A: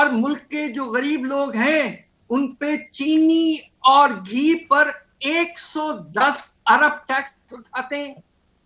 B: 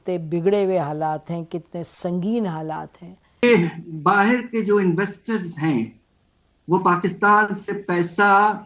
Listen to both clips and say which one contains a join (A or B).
B